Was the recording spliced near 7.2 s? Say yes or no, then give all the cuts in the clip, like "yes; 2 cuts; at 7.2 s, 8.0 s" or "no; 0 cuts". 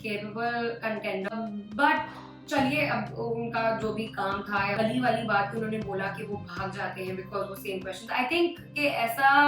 no; 2 cuts; at 1.3 s, 4.7 s